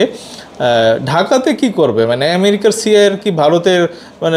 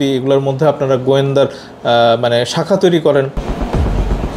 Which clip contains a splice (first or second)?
second